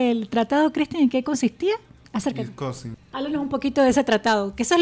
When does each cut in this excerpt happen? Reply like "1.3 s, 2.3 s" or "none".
1.9 s, 2.9 s

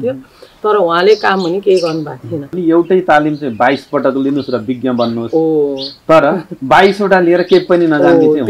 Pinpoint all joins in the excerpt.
2.5 s

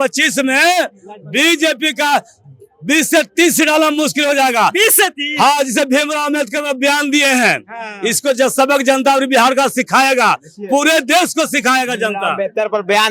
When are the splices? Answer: none

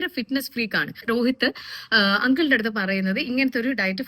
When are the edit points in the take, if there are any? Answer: 1.0 s

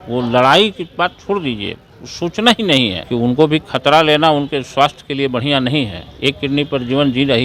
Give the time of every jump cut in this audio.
3.0 s

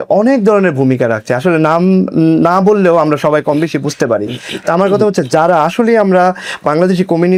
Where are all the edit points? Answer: none

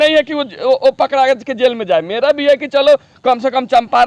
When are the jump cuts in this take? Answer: none

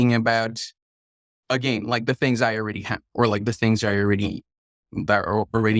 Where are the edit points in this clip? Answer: none

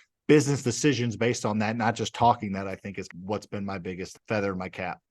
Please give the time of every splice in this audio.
3.1 s, 4.1 s

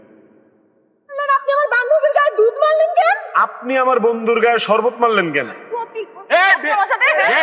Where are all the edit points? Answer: 1.2 s, 5.8 s

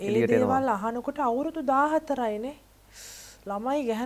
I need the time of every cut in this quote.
none

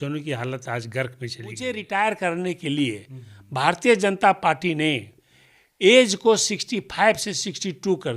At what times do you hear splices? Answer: 1.6 s

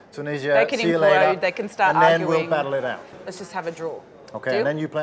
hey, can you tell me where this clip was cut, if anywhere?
3.0 s

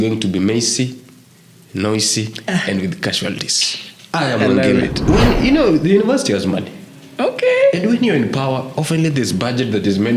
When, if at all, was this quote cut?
5.0 s

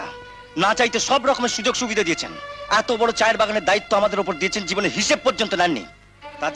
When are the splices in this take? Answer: none

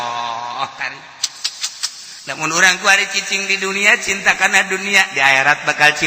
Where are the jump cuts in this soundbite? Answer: none

